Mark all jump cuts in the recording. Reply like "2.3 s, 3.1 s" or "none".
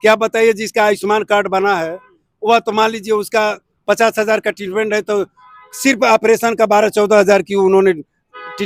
none